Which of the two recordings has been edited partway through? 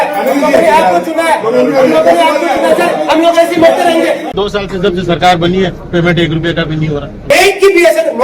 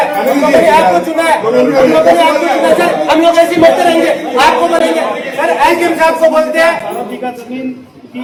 first; 2 cuts; at 4.3 s, 7.3 s

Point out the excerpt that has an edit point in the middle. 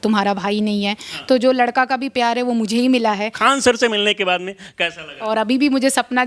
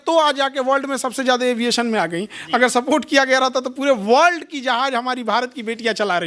first; 2 cuts; at 3.4 s, 5.1 s

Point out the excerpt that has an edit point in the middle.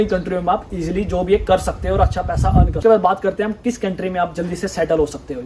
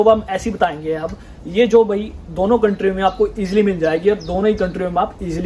first; 1 cut; at 2.7 s

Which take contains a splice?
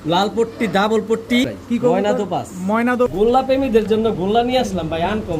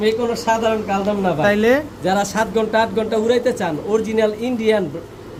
first; 2 cuts; at 1.4 s, 3.1 s

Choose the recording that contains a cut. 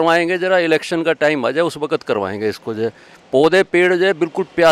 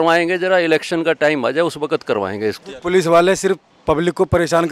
second; 2 cuts; at 2.7 s, 3.7 s

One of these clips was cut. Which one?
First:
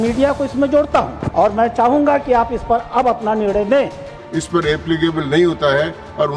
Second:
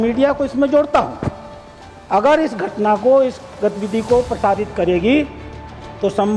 first; 2 cuts; at 1.2 s, 4.1 s

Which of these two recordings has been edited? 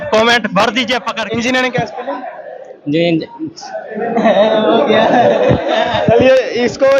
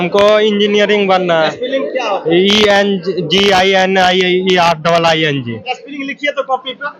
first; 1 cut; at 1.1 s

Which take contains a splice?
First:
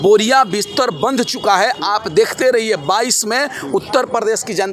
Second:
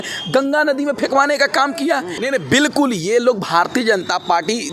second; 1 cut; at 2.2 s

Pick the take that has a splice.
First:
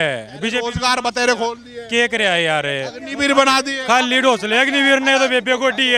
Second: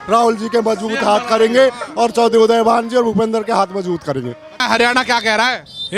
second; 1 cut; at 4.6 s

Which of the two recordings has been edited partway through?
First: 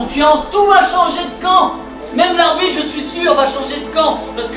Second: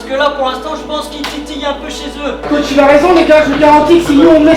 second; 1 cut; at 2.3 s

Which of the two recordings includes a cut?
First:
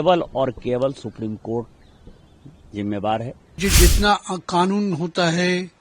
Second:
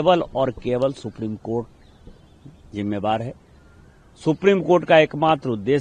first; 1 cut; at 3.6 s

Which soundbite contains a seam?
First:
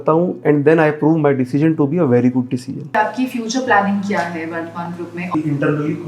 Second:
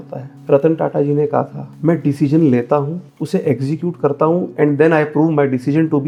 first; 2 cuts; at 2.9 s, 5.3 s

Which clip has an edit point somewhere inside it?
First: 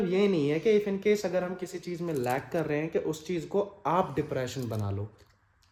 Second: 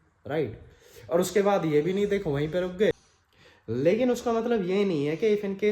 second; 1 cut; at 3.1 s

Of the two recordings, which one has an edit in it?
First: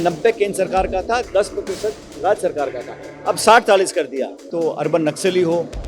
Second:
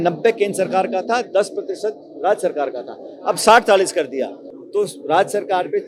first; 1 cut; at 4.5 s

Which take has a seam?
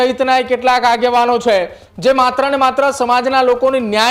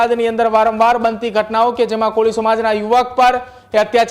first; 1 cut; at 1.8 s

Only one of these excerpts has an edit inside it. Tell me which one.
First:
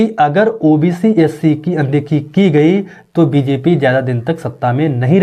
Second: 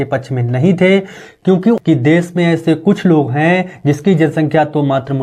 second; 1 cut; at 1.8 s

